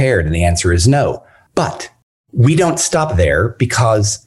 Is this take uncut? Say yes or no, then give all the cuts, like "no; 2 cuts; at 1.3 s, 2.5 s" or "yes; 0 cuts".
no; 1 cut; at 1.3 s